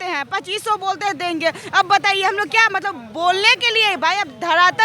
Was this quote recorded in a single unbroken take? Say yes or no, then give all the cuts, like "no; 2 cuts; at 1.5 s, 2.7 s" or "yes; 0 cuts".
yes; 0 cuts